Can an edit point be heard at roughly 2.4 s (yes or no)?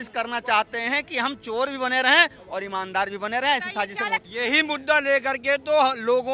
no